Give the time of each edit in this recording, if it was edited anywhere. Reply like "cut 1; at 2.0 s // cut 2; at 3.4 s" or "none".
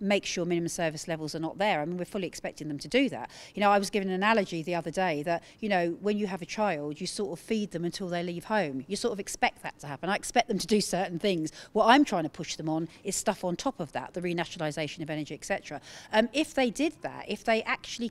none